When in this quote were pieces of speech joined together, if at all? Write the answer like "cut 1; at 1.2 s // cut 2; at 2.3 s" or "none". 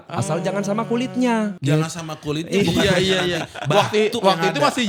none